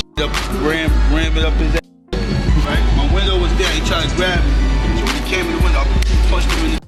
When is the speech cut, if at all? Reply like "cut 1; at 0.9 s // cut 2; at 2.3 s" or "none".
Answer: none